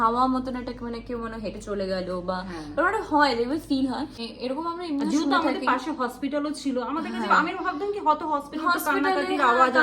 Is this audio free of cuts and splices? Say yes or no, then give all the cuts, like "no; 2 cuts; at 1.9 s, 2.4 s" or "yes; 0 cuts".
no; 1 cut; at 4.3 s